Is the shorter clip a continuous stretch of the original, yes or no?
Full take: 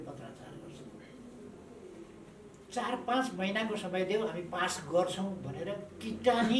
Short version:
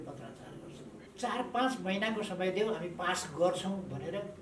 no